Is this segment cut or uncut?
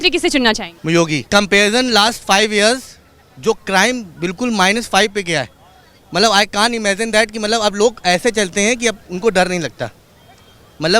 cut